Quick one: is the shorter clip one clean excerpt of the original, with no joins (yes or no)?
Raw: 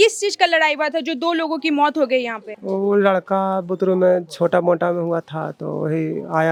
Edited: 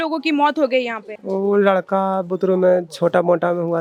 yes